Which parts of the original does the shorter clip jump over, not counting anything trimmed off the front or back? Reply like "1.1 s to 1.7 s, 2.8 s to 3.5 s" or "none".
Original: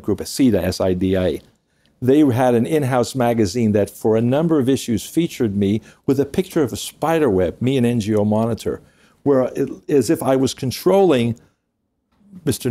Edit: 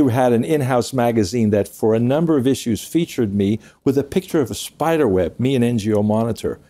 none